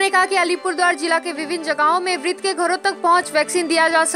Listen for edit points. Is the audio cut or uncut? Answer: uncut